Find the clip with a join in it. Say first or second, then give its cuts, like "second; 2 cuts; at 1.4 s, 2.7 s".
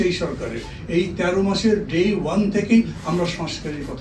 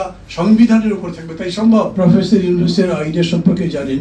second; 1 cut; at 1.9 s